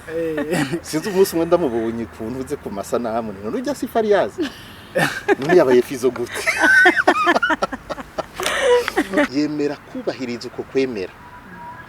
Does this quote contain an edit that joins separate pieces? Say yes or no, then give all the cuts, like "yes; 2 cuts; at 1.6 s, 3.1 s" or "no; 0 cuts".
yes; 1 cut; at 9.3 s